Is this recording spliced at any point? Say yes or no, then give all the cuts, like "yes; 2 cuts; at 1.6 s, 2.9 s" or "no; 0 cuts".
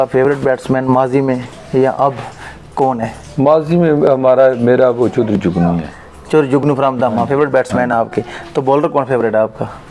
no; 0 cuts